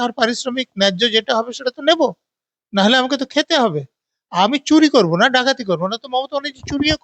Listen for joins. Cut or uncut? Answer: uncut